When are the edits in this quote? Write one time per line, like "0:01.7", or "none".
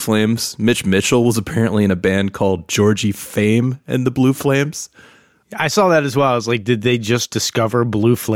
0:05.1
0:07.4